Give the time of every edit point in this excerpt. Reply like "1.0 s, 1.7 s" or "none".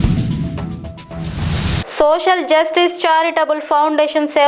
1.8 s